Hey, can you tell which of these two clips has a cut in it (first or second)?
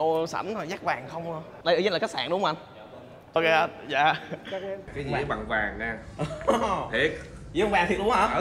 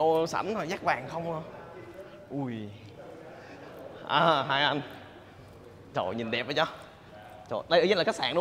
first